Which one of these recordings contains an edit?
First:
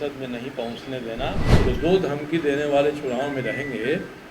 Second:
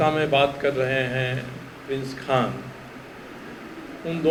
first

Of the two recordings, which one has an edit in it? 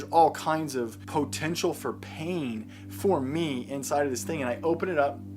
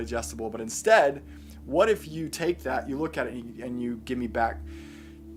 first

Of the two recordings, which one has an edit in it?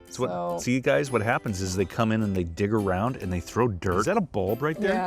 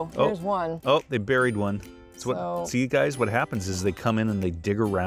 first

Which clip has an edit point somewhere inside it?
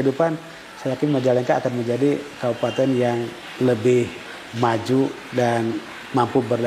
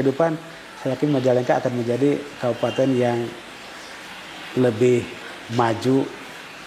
first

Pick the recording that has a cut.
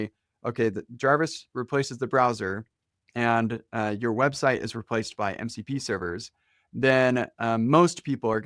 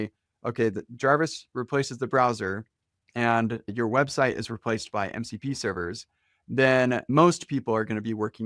second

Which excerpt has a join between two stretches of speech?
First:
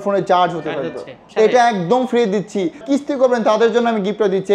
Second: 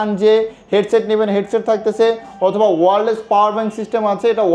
first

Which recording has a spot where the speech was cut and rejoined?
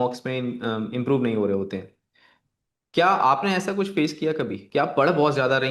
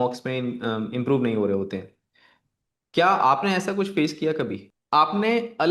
second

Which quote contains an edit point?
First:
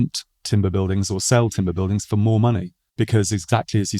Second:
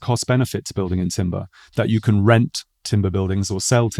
first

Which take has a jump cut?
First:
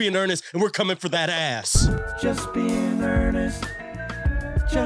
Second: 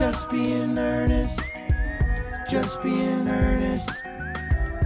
first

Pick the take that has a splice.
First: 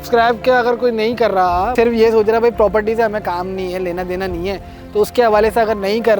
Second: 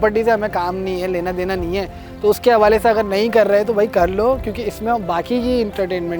first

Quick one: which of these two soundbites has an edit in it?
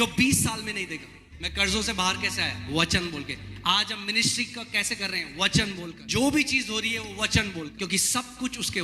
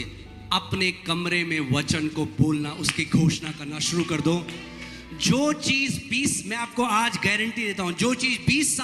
first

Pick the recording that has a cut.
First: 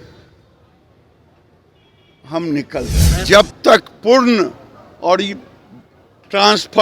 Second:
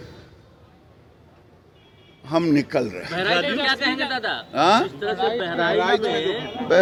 first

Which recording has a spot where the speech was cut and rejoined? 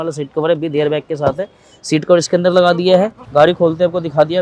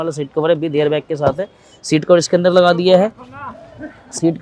first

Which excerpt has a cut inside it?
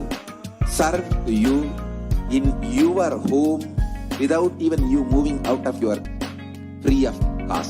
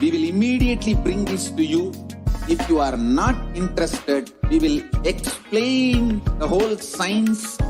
first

